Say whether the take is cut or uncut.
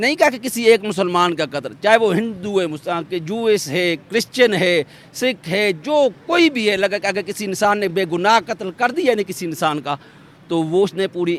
uncut